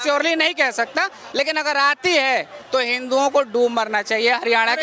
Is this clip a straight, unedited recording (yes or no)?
no